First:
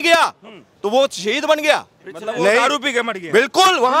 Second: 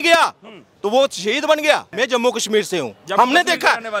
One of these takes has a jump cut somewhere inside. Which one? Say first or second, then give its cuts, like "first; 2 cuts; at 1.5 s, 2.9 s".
second; 1 cut; at 1.9 s